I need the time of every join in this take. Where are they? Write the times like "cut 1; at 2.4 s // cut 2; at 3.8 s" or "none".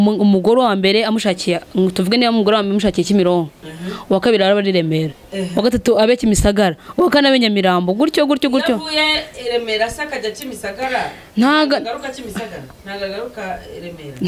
none